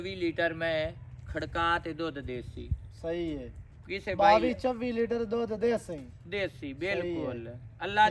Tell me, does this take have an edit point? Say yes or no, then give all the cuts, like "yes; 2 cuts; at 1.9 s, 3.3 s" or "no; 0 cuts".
no; 0 cuts